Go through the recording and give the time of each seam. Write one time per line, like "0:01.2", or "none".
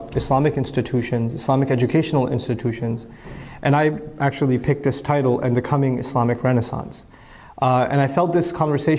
0:02.5